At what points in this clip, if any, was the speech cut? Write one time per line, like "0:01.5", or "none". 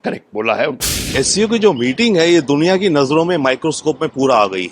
0:01.1